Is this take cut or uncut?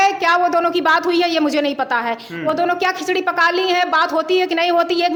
uncut